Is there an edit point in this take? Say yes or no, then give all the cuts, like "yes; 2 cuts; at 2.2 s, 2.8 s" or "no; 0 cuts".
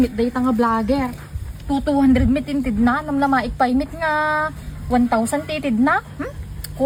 no; 0 cuts